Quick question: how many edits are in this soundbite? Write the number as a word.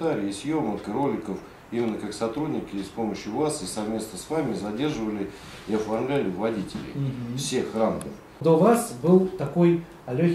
one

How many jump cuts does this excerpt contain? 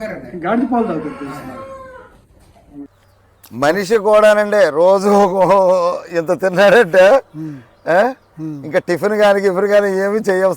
one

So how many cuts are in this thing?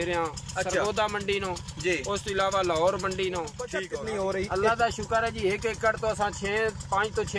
one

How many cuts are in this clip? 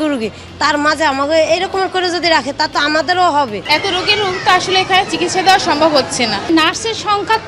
two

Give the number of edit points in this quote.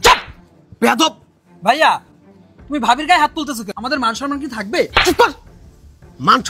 one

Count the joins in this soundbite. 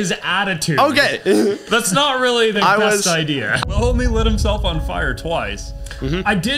one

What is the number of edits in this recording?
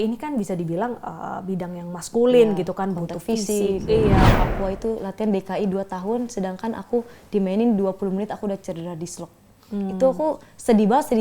one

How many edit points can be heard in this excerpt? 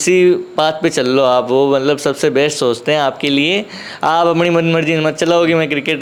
zero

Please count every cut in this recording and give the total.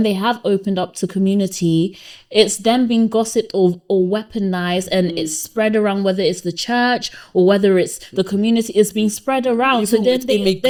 zero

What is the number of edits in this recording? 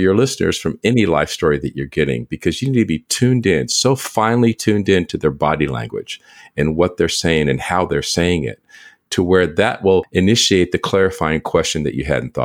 one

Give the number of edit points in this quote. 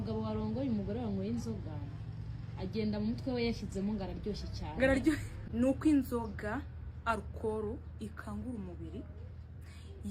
one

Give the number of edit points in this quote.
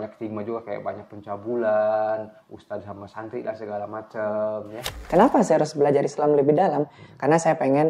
one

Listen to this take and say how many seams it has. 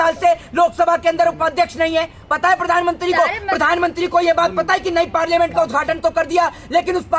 zero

